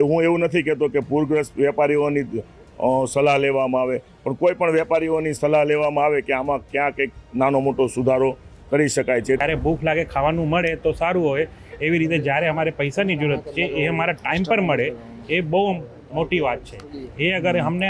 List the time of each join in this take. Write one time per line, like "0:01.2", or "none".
0:09.4